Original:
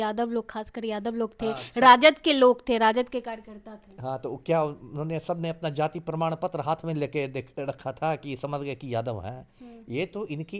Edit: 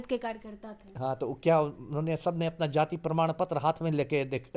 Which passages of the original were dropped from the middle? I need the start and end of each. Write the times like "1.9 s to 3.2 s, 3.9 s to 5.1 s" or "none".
none